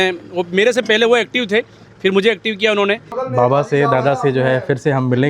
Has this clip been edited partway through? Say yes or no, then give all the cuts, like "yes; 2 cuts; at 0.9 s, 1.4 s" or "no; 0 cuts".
yes; 1 cut; at 3.1 s